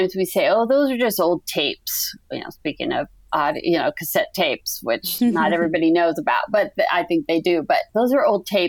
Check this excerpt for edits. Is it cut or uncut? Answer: uncut